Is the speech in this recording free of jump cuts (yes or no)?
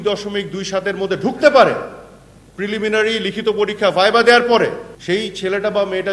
yes